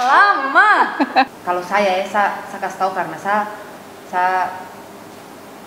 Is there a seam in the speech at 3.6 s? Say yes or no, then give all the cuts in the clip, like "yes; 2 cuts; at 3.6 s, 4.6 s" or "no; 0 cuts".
no; 1 cut; at 1.3 s